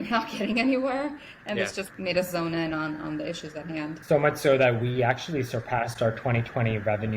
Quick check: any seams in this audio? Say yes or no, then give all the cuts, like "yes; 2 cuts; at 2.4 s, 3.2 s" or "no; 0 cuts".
yes; 2 cuts; at 1.9 s, 4.0 s